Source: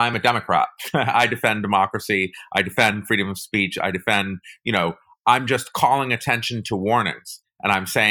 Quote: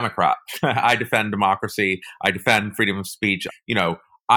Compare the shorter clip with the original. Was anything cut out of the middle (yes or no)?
yes